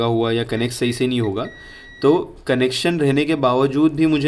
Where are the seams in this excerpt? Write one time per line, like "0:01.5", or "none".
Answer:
none